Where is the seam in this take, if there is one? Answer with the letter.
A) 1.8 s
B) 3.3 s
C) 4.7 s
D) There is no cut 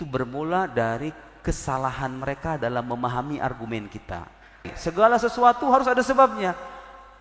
C